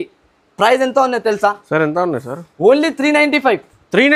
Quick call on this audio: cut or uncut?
uncut